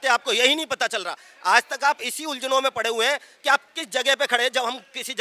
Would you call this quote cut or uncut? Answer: uncut